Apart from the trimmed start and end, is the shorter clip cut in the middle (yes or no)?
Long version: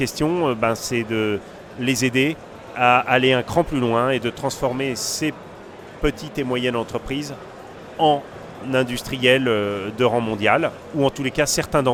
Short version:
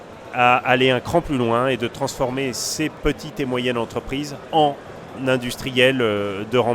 yes